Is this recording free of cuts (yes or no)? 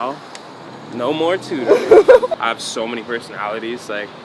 no